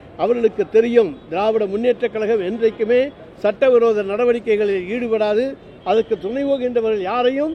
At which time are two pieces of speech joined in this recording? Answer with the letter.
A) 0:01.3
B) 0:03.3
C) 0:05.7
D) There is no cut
D